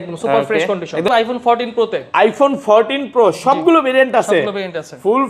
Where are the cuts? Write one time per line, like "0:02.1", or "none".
0:01.1